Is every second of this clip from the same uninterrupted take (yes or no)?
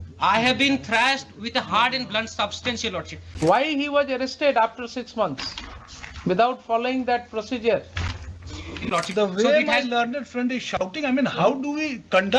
no